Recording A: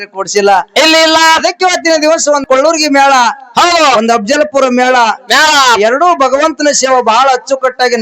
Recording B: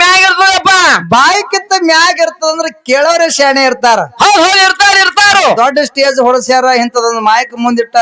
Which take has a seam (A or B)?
A